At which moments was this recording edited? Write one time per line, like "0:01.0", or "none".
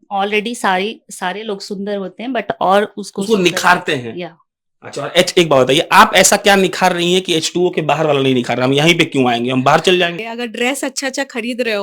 0:10.2